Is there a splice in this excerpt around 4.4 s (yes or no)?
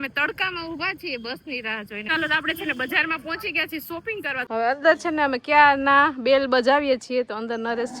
yes